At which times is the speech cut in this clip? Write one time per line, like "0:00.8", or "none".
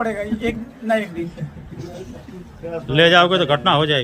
none